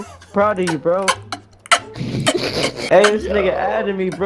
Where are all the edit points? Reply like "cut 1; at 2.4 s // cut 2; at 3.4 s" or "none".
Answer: cut 1; at 2.8 s